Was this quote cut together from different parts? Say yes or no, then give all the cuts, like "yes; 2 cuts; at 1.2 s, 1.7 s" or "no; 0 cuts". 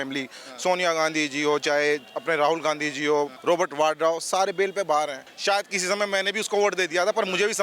yes; 2 cuts; at 3.3 s, 5.3 s